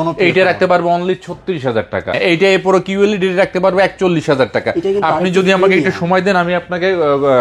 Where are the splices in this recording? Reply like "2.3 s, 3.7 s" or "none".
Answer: 2.2 s